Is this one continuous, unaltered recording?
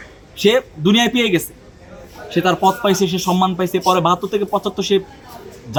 yes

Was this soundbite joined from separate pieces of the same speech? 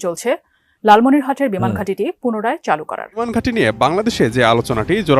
yes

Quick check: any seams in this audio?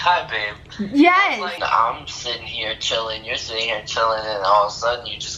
yes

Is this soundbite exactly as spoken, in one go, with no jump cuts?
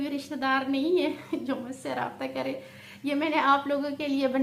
yes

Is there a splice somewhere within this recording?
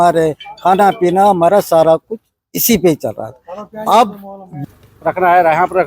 yes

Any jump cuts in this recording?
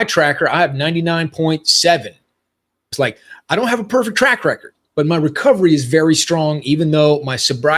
yes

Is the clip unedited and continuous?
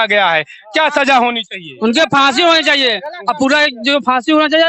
yes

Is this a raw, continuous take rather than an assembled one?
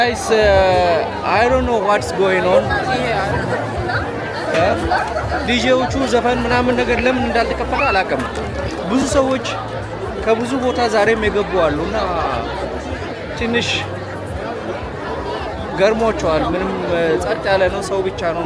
yes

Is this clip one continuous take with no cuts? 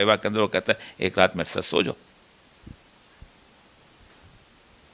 yes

